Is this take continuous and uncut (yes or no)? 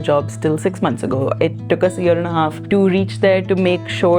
no